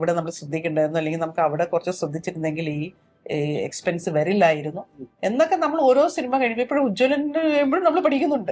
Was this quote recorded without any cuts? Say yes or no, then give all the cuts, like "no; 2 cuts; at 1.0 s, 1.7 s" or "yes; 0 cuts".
yes; 0 cuts